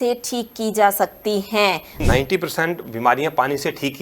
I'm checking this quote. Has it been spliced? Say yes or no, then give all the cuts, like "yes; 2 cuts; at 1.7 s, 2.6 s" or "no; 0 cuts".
yes; 1 cut; at 2.0 s